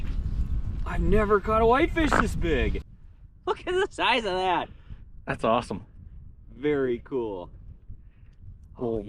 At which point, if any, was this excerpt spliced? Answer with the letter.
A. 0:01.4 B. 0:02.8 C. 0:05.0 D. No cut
B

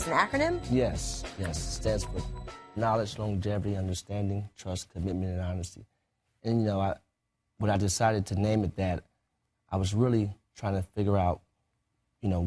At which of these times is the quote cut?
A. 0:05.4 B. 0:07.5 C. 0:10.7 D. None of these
C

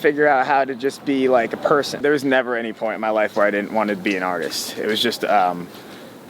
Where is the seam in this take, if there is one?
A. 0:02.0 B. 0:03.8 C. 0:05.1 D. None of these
A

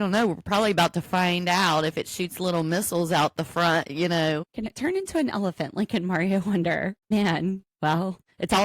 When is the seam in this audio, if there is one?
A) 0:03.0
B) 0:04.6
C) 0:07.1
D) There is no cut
C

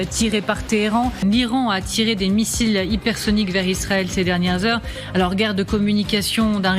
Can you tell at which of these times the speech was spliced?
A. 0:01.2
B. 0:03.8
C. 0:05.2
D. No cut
A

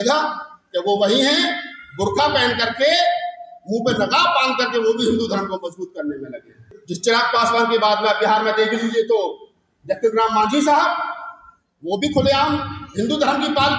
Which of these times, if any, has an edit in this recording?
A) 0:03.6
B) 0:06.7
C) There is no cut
B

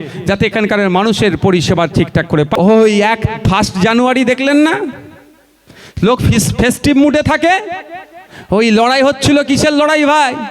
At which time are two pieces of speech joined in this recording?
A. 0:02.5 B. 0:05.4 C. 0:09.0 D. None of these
A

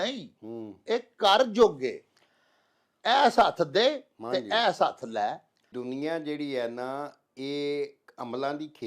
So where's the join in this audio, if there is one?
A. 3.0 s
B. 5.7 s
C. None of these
B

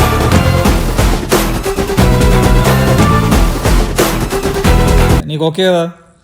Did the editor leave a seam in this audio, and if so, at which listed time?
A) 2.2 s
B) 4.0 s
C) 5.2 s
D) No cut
C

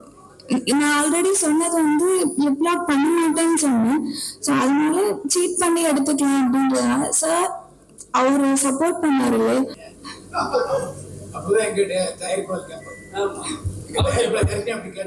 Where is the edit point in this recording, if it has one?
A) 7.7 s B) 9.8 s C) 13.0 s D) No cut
B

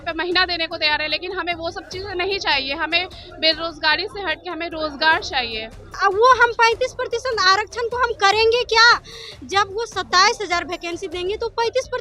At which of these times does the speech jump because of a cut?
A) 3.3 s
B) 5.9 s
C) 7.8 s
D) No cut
B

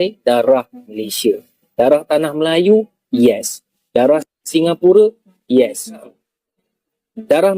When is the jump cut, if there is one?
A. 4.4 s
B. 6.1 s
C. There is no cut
B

